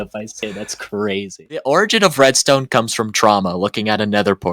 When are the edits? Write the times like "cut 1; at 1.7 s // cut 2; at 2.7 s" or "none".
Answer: cut 1; at 1.6 s